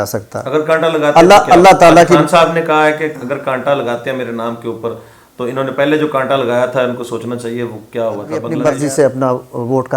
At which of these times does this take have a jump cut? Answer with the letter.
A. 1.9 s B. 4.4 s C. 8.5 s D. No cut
C